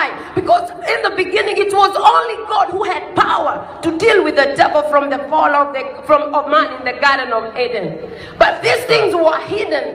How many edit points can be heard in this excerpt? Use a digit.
1